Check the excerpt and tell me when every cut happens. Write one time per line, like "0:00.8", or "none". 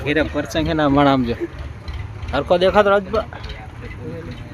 none